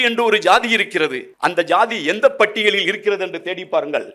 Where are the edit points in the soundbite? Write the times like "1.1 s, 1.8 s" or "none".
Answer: 1.2 s